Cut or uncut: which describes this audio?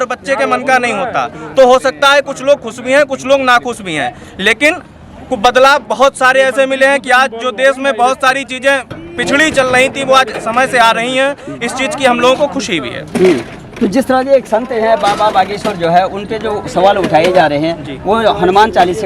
uncut